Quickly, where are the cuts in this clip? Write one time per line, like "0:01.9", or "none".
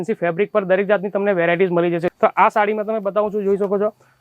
0:02.1